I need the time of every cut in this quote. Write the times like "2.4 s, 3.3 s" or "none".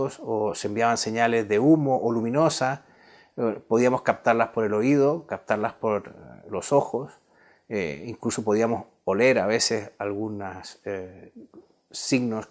2.4 s